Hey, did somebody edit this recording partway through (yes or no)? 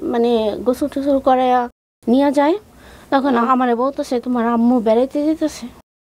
yes